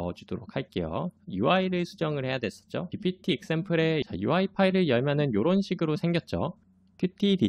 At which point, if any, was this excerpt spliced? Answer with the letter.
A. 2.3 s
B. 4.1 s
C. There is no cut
B